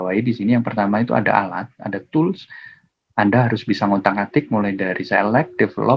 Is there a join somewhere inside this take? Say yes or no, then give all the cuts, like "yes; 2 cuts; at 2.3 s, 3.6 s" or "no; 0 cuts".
no; 0 cuts